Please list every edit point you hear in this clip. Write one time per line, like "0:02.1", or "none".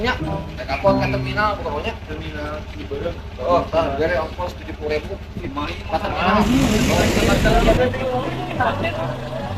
0:07.0